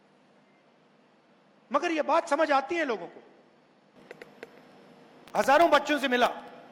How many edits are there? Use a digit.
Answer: 1